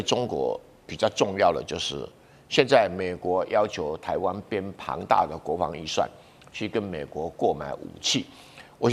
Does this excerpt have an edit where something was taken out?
no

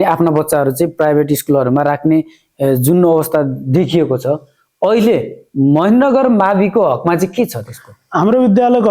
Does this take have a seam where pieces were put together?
no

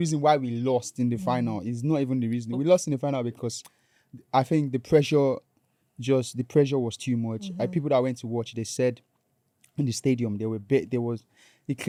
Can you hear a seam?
no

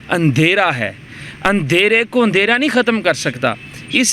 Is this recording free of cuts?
yes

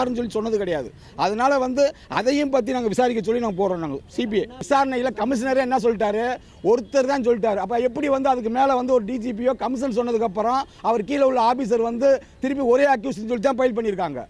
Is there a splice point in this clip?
yes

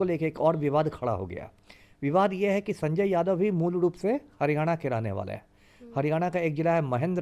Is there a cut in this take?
no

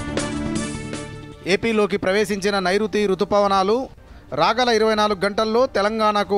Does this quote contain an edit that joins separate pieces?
yes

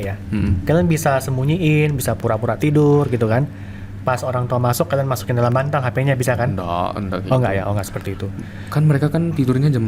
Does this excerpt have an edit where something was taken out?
no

